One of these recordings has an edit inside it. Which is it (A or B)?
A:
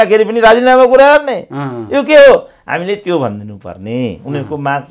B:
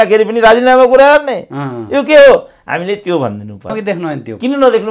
B